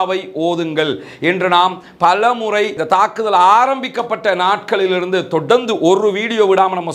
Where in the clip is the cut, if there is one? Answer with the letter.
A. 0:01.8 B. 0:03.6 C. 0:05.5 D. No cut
D